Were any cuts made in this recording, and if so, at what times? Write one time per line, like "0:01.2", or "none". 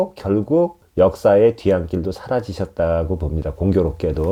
none

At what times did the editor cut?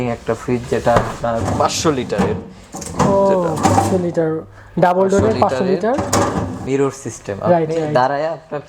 0:01.5
0:06.6

